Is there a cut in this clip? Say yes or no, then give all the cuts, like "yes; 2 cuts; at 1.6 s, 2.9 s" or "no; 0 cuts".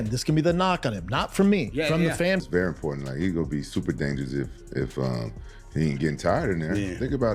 yes; 1 cut; at 2.4 s